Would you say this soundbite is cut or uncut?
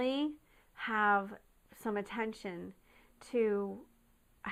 uncut